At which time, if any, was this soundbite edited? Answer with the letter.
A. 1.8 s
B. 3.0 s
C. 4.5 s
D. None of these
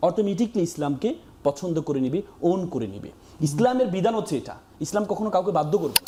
D